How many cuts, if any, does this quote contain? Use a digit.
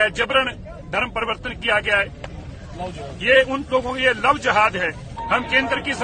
1